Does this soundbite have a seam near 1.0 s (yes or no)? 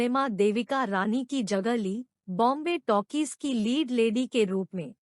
no